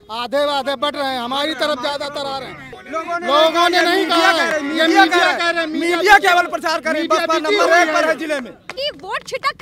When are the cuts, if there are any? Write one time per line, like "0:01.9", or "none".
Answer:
0:02.8
0:08.7